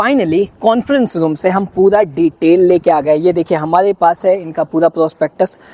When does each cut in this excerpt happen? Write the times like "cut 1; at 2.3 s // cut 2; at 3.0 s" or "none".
none